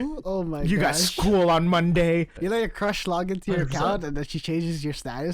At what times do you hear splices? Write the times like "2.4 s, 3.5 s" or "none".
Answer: 2.3 s